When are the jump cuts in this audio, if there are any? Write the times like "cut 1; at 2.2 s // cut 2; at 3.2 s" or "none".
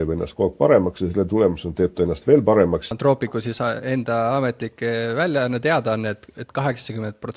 cut 1; at 2.9 s